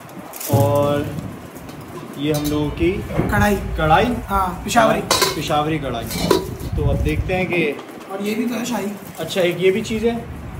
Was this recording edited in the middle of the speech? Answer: no; 0 cuts

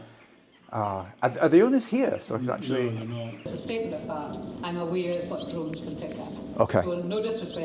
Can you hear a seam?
yes; 1 cut; at 3.4 s

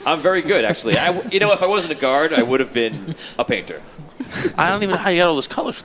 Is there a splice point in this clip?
no; 0 cuts

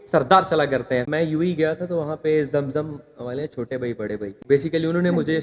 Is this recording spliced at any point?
yes; 2 cuts; at 1.1 s, 4.4 s

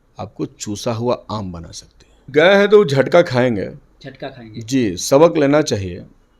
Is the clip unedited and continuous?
no; 1 cut; at 2.2 s

